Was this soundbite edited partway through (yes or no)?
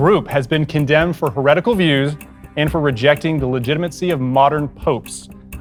no